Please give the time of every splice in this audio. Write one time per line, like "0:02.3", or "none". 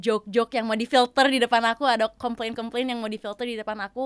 none